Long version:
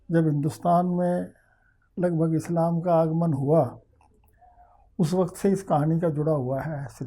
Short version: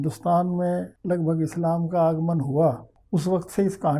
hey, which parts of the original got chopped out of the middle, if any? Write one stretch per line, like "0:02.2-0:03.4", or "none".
0:01.3-0:01.8
0:03.8-0:04.8